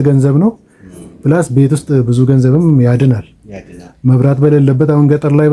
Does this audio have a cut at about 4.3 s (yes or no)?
no